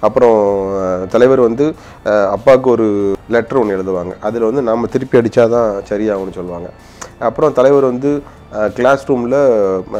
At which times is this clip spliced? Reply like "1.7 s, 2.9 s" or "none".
3.2 s

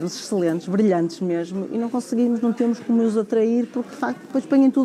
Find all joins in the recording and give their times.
none

